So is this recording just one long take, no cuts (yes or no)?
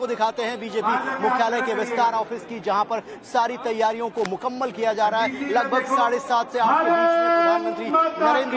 yes